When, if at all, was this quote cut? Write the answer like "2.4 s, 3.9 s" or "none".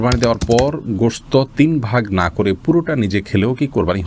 none